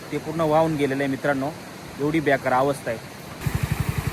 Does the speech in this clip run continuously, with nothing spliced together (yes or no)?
yes